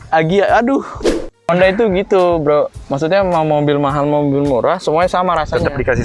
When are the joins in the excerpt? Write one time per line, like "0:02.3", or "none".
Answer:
0:01.5